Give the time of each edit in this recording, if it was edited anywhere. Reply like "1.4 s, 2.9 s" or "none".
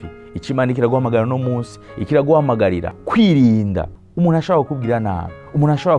3.0 s, 4.0 s